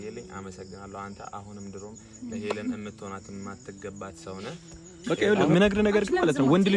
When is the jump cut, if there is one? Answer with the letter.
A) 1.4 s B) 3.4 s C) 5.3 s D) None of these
C